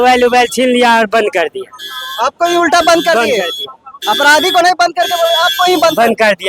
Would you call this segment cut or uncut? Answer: uncut